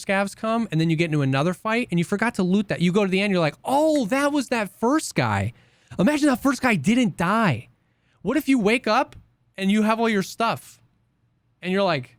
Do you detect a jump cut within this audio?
no; 0 cuts

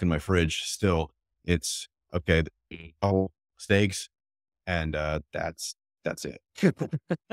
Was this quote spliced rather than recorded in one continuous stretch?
no; 0 cuts

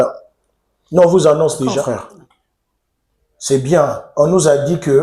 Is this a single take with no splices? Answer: no; 1 cut; at 1.8 s

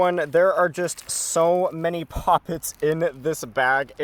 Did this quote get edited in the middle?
no; 0 cuts

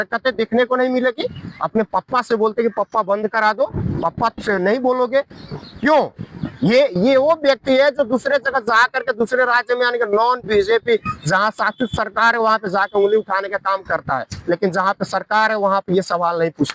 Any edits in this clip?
no; 0 cuts

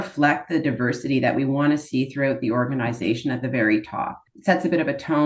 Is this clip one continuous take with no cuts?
no; 1 cut; at 4.3 s

